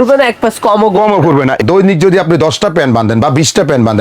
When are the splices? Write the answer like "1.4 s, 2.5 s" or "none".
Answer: 1.6 s